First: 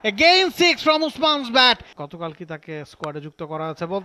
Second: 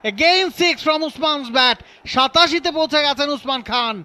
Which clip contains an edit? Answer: first; 1 cut; at 1.9 s

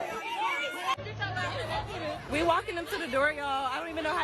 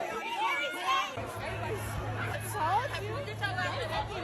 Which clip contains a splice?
first; 1 cut; at 0.9 s

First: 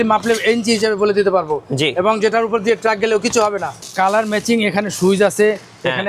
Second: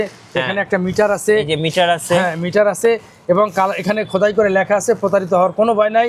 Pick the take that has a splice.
first; 1 cut; at 3.8 s

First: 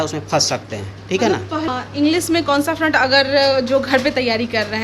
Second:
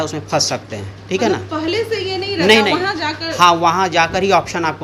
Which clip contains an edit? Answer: first; 1 cut; at 1.7 s

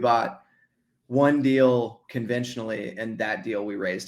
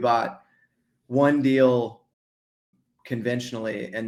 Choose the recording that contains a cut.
first; 1 cut; at 2.0 s

